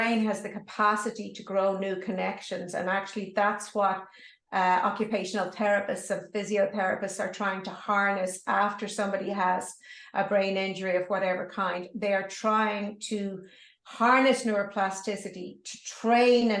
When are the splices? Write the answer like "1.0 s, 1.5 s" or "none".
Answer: none